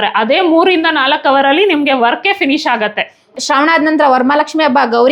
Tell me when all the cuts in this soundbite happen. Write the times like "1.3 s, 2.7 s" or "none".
3.2 s